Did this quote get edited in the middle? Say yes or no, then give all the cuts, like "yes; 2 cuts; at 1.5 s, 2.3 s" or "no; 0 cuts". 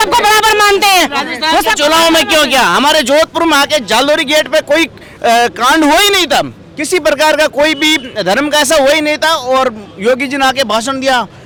no; 0 cuts